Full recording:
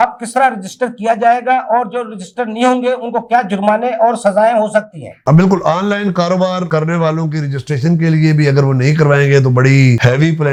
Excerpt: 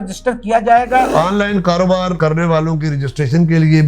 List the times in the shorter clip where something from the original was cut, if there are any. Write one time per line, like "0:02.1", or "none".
0:01.1